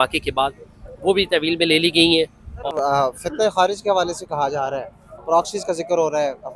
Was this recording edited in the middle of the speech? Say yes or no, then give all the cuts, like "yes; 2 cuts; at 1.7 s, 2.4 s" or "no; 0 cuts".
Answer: yes; 1 cut; at 2.5 s